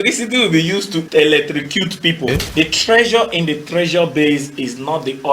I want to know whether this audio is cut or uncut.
cut